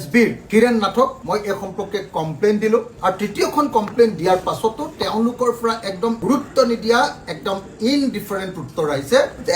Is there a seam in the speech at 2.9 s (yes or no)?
yes